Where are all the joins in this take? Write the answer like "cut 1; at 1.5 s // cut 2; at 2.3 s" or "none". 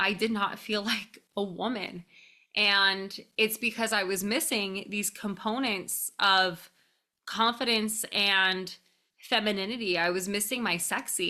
none

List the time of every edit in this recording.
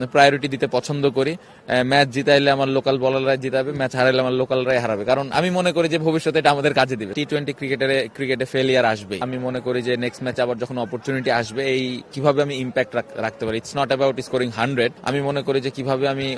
cut 1; at 7.1 s // cut 2; at 9.2 s // cut 3; at 15.0 s

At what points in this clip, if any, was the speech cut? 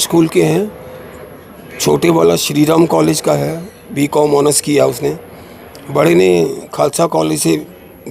none

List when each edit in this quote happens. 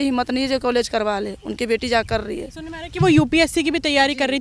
none

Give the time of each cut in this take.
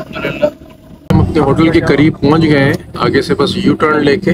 cut 1; at 1.1 s

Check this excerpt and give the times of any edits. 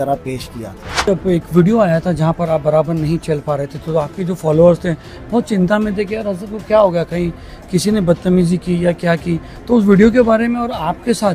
cut 1; at 1.1 s

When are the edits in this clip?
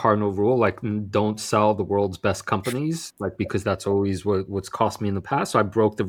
none

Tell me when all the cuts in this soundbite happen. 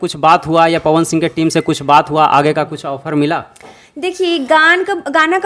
none

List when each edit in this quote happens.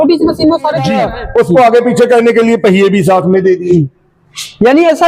cut 1; at 1.1 s

